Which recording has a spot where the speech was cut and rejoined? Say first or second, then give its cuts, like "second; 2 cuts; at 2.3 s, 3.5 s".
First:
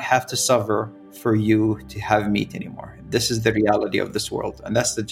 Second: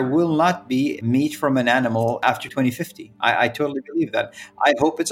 second; 2 cuts; at 1.0 s, 2.3 s